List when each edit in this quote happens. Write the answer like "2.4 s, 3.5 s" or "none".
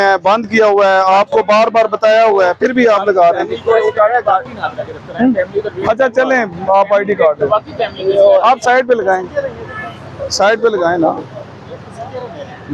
none